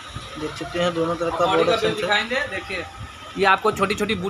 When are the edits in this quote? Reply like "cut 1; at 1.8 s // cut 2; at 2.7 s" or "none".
none